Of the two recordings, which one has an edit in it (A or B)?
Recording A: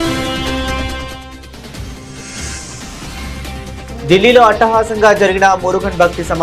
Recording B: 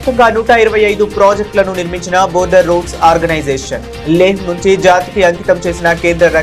A